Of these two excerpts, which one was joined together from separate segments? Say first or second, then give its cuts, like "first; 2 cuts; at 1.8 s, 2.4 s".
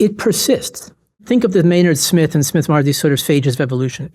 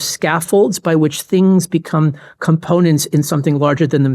first; 1 cut; at 1.2 s